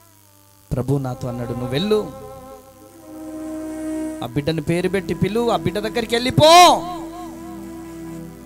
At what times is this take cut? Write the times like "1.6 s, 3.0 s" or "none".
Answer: none